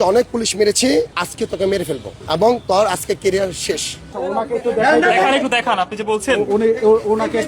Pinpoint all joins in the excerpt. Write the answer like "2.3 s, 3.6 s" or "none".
1.2 s, 2.1 s, 4.2 s